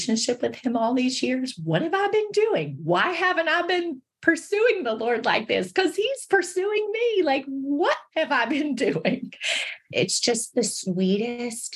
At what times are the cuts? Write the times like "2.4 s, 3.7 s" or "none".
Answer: 9.9 s